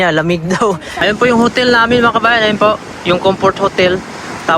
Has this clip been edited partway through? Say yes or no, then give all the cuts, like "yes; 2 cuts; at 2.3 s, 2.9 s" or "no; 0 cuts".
yes; 1 cut; at 1.0 s